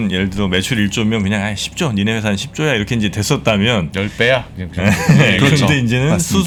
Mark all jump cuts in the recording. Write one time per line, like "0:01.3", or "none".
none